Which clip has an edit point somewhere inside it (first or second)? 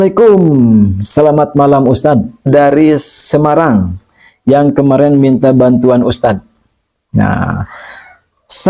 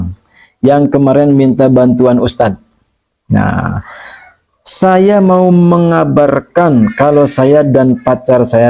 first